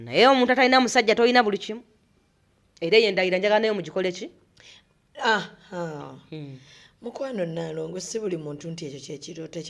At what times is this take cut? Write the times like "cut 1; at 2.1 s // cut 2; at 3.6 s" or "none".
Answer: none